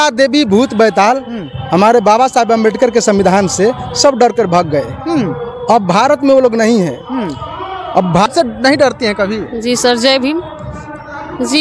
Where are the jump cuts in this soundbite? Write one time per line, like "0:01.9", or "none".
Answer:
0:08.3